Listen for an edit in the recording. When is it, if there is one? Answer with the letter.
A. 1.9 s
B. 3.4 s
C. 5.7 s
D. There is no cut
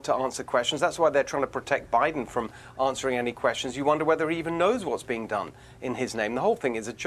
D